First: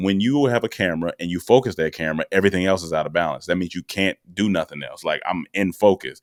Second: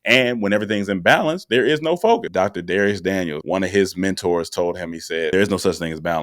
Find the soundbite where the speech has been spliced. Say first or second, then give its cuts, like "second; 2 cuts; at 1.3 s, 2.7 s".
second; 3 cuts; at 2.3 s, 3.4 s, 5.3 s